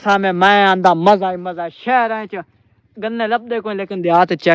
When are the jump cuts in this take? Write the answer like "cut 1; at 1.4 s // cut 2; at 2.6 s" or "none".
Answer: none